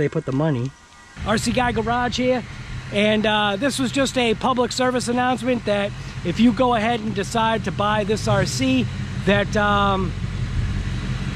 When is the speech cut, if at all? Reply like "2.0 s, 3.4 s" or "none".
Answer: 1.2 s